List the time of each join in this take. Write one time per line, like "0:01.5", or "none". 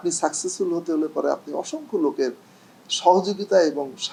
none